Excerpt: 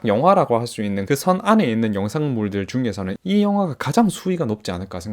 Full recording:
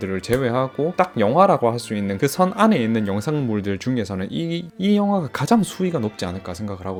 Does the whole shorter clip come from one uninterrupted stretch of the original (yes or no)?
no